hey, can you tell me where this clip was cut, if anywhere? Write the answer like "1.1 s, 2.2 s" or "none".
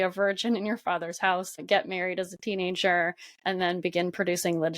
1.5 s